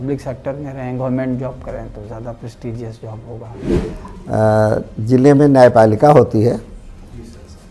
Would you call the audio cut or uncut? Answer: cut